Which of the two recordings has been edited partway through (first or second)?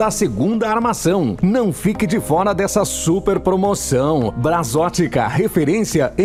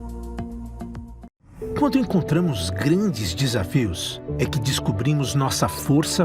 second